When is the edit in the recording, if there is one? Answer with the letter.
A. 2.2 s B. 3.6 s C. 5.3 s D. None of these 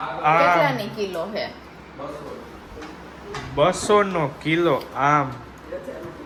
D